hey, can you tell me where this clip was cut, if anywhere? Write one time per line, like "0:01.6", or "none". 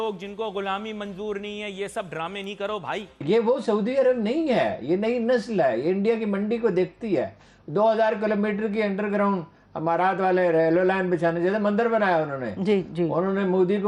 0:03.1